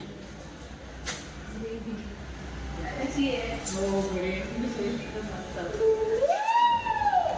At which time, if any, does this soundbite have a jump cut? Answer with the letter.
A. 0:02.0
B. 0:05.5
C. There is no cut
C